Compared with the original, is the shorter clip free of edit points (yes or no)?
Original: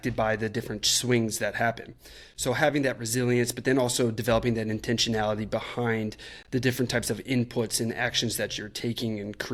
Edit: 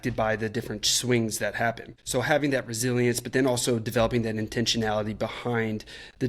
no